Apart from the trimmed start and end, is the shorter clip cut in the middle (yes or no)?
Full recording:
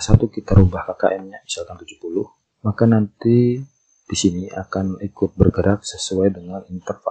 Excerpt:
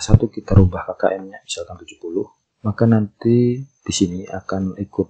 yes